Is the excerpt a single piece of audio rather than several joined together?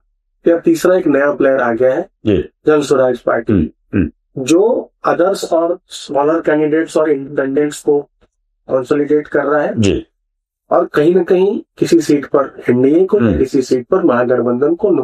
yes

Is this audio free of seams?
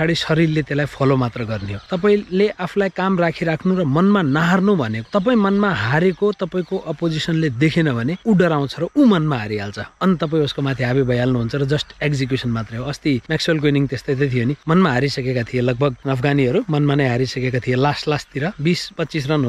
yes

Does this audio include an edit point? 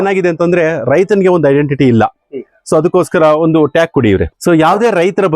yes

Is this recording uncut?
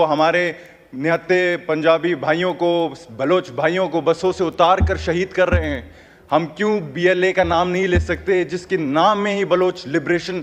yes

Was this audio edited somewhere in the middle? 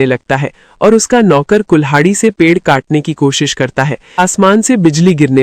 yes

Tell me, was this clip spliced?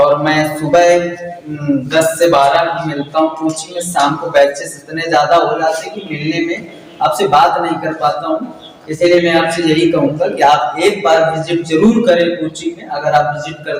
no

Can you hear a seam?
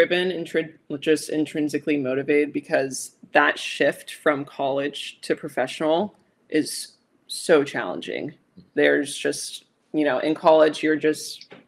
no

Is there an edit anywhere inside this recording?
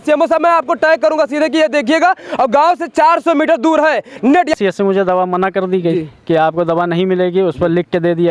yes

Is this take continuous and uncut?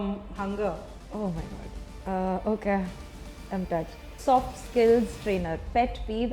no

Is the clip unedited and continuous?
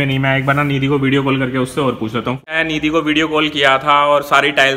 no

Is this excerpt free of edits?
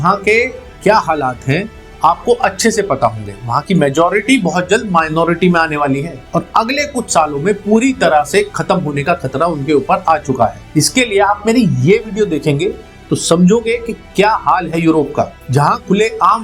yes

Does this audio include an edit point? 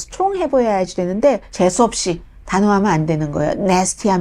yes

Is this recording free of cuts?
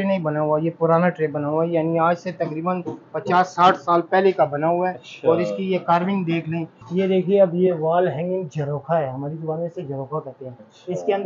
no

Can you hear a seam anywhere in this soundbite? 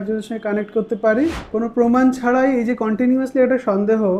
yes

